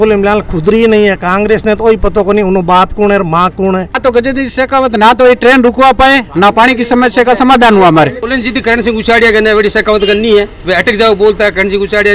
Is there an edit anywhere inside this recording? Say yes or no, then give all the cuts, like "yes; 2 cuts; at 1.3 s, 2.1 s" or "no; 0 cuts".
yes; 2 cuts; at 4.0 s, 8.3 s